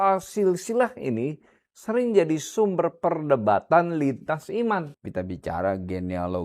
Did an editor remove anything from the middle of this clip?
yes; 1 cut; at 5.0 s

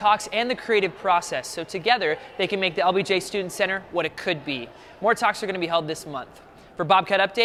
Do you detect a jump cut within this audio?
no; 0 cuts

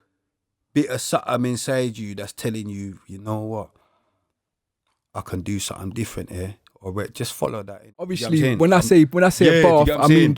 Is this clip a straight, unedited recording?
no; 1 cut; at 8.2 s

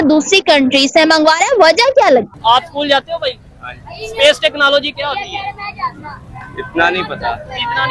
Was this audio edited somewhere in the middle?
yes; 1 cut; at 2.3 s

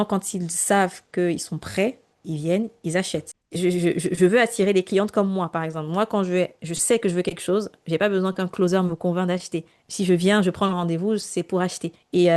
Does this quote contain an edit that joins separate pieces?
no; 0 cuts

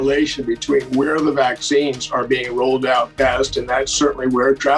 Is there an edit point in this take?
no; 0 cuts

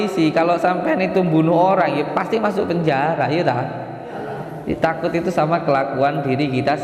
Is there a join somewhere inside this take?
no; 0 cuts

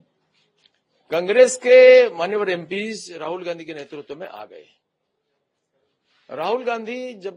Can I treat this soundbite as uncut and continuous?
yes; 0 cuts

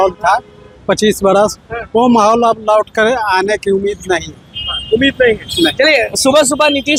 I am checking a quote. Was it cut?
no; 0 cuts

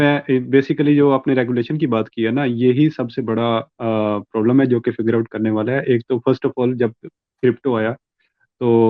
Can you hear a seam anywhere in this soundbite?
no; 0 cuts

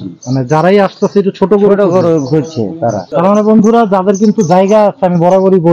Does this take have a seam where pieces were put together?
yes; 1 cut; at 3.1 s

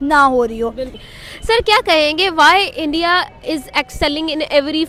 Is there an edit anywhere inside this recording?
no; 0 cuts

